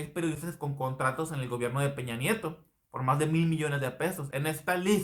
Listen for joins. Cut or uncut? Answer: uncut